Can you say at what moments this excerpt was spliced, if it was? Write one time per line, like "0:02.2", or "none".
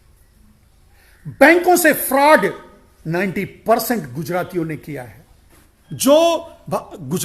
0:05.8